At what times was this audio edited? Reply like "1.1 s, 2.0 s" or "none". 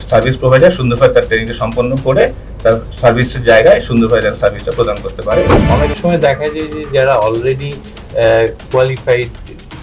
5.6 s